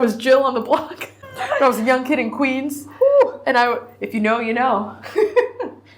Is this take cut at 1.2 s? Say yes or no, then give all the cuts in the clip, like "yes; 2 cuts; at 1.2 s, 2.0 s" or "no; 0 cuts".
yes; 1 cut; at 1.2 s